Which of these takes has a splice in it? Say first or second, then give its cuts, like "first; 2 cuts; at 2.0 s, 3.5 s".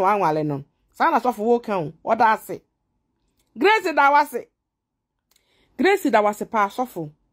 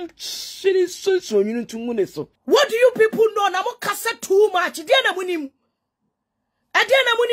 second; 1 cut; at 2.3 s